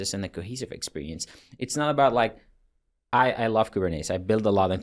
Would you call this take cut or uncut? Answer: uncut